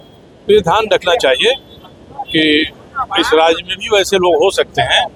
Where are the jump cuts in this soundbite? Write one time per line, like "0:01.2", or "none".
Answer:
none